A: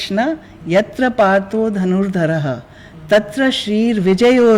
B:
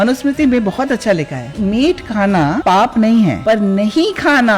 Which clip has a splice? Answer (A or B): B